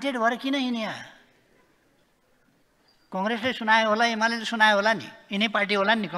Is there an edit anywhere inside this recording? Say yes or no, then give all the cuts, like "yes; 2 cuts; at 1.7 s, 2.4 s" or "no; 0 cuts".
yes; 1 cut; at 2.0 s